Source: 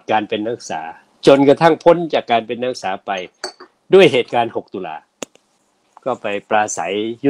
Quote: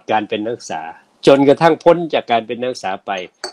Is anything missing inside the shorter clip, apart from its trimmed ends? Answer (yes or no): no